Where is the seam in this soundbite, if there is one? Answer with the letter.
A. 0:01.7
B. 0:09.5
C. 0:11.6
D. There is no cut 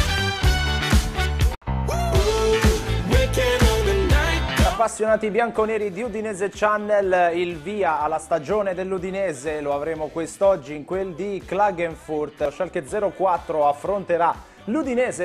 D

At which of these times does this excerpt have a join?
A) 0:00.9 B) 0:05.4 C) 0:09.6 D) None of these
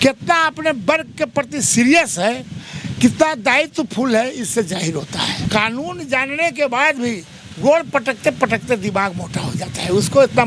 B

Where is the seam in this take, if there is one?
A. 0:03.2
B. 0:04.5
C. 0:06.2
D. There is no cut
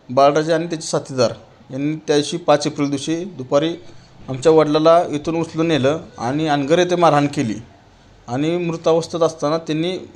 D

